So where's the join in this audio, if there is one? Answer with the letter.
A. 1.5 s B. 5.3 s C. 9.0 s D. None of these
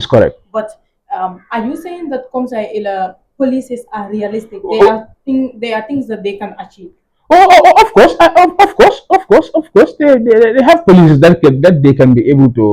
D